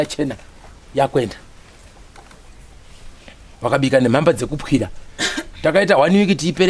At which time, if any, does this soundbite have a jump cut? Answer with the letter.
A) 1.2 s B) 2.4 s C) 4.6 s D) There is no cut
A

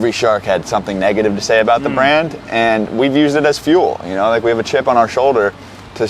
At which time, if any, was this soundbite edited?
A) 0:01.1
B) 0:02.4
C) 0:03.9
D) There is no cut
D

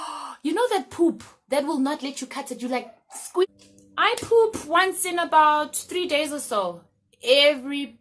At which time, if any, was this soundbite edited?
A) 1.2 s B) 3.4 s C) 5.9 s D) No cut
B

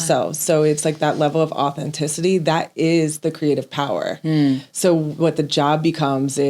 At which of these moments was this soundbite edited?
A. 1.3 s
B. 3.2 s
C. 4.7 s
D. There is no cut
D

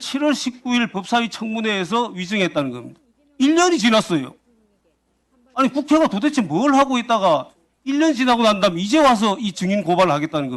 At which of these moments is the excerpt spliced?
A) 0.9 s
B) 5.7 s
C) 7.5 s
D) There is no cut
D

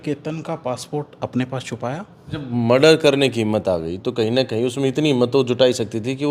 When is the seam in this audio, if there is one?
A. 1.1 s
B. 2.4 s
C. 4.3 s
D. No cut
B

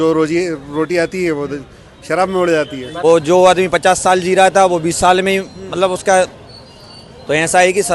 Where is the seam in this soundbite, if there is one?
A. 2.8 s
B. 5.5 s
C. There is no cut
A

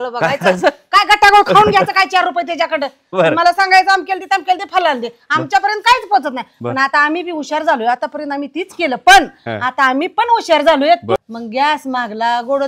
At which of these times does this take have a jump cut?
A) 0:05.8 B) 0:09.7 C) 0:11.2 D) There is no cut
C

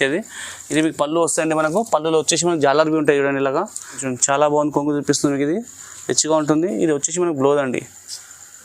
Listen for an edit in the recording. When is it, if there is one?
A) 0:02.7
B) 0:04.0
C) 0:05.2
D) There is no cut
B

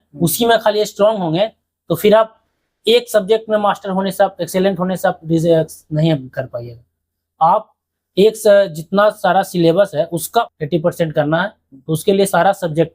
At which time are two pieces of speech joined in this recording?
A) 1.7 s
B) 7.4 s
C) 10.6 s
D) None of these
C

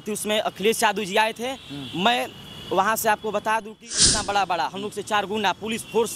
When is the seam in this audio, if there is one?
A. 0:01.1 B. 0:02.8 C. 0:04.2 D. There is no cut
C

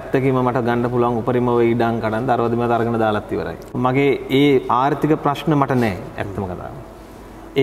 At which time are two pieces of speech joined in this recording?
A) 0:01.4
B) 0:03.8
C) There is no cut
B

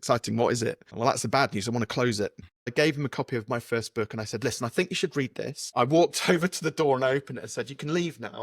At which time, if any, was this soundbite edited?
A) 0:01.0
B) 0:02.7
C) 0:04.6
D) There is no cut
B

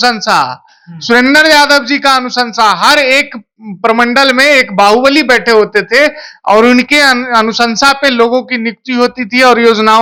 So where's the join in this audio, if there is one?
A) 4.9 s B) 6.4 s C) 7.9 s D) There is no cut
D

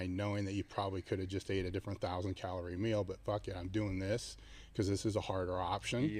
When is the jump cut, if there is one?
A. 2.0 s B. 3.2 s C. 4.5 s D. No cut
D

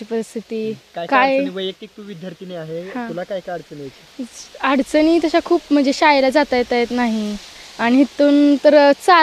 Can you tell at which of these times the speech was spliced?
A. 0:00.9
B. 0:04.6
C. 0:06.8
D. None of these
D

